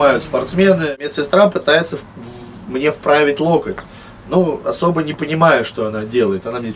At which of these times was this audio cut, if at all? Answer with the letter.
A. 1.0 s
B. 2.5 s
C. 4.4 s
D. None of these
A